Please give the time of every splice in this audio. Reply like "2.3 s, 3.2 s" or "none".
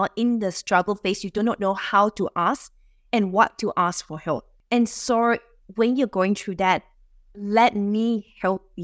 4.5 s